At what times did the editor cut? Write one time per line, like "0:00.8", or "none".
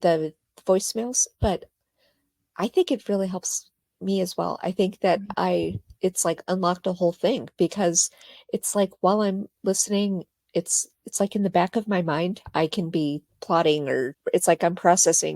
0:13.3
0:14.1